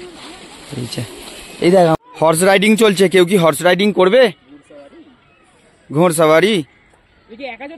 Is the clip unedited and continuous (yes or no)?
no